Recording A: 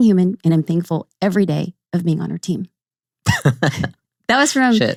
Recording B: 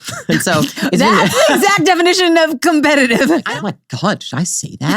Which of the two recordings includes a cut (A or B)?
B